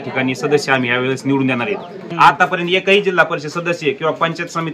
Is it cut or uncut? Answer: cut